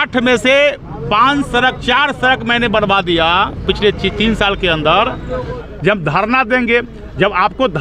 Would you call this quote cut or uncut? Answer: cut